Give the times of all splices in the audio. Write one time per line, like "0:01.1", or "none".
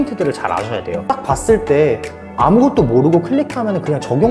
0:01.1

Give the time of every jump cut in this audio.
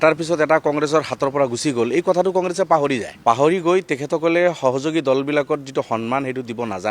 0:03.1

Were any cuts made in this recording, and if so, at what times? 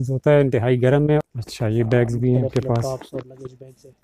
0:01.2

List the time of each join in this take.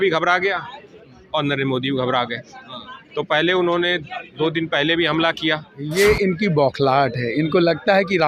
0:05.9

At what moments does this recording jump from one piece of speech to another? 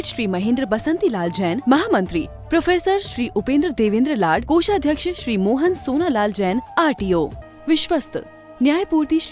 0:07.4

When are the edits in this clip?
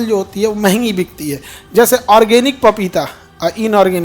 none

